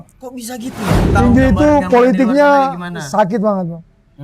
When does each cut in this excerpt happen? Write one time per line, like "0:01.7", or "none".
0:01.1